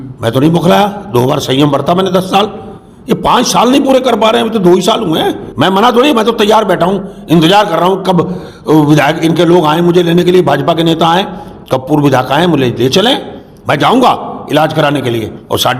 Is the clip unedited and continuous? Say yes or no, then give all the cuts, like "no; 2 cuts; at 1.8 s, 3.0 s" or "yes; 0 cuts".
no; 1 cut; at 5.5 s